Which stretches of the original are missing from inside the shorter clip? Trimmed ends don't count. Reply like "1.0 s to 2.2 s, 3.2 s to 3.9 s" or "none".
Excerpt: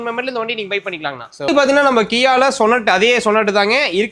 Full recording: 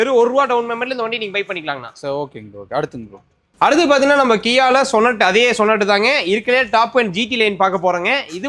2.1 s to 3.8 s